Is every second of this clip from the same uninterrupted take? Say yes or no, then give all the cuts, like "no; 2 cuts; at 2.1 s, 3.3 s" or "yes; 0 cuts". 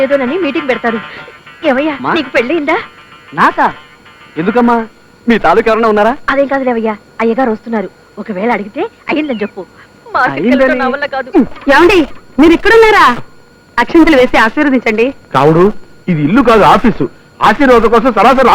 no; 1 cut; at 11.6 s